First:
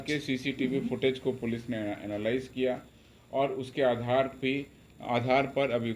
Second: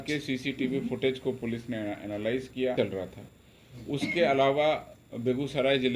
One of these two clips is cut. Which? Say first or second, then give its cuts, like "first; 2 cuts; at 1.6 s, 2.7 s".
second; 1 cut; at 2.7 s